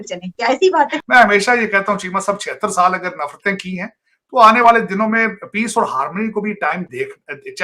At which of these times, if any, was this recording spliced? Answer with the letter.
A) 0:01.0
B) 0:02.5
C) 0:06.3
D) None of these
A